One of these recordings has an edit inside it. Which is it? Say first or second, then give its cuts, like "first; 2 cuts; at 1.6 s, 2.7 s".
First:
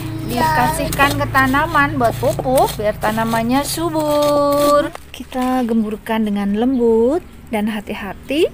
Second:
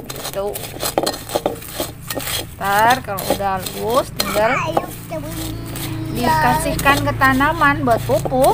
first; 1 cut; at 4.8 s